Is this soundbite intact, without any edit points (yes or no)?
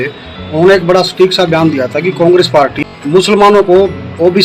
no